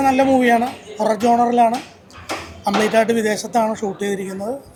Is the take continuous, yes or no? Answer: yes